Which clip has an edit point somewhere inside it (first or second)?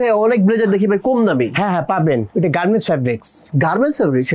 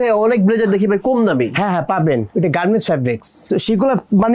second